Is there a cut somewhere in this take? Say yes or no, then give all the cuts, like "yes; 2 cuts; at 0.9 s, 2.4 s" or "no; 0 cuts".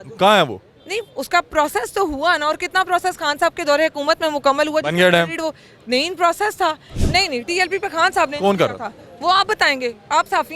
yes; 1 cut; at 6.9 s